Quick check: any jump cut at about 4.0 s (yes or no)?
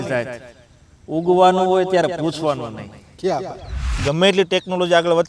yes